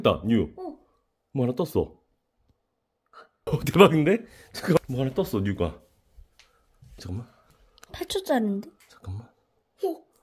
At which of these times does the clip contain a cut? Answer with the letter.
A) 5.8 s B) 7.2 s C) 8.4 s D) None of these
B